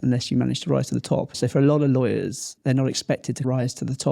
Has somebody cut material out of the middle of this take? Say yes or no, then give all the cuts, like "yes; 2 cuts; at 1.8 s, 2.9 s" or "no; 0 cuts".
yes; 3 cuts; at 1.3 s, 2.5 s, 3.4 s